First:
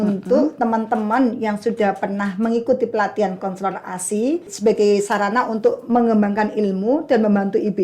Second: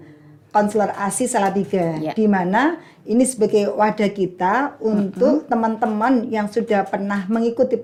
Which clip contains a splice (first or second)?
first